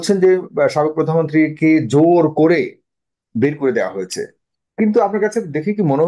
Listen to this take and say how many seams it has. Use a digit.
0